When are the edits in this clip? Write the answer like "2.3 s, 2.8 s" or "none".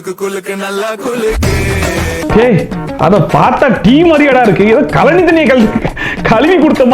2.2 s

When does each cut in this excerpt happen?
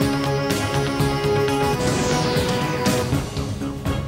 3.0 s

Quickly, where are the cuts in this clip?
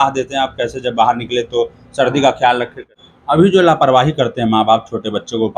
2.8 s

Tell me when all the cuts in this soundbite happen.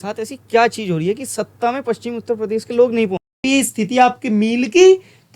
3.3 s

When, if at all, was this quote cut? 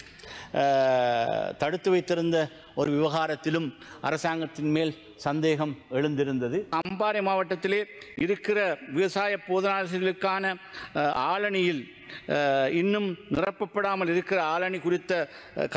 6.7 s

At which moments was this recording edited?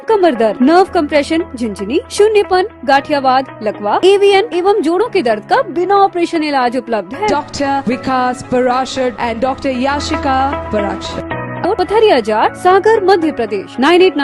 11.6 s

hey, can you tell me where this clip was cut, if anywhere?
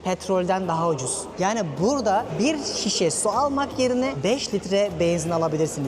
1.2 s, 2.3 s, 4.2 s

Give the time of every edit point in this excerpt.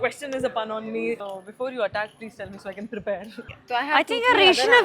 1.3 s, 3.4 s

